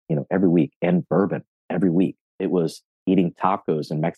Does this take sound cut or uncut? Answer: cut